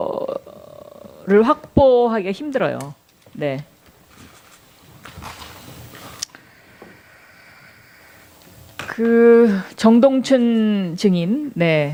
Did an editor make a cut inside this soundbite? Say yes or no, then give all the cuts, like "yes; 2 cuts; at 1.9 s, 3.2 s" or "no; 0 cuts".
no; 0 cuts